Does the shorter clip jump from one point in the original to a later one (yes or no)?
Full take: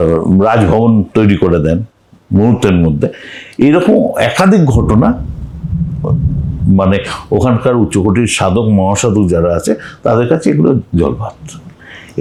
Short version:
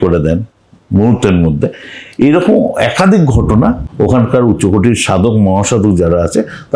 yes